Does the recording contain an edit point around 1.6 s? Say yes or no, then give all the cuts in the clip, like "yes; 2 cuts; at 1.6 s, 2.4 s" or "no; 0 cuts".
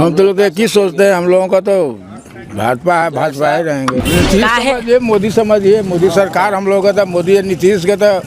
no; 1 cut; at 4.0 s